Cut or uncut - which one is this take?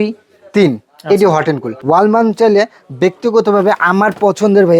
cut